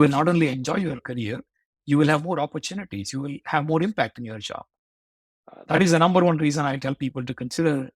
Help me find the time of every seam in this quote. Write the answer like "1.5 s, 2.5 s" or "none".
none